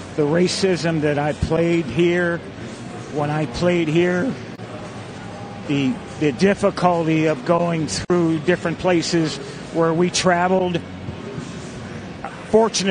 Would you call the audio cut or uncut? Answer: uncut